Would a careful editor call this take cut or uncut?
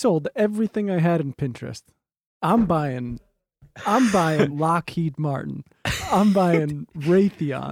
cut